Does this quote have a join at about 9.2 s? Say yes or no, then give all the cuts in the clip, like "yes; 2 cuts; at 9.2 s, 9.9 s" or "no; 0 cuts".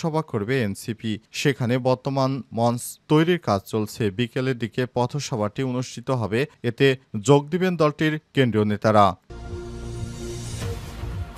yes; 1 cut; at 9.2 s